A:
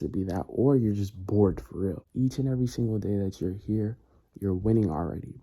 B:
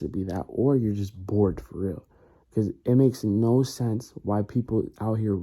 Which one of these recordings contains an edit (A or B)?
A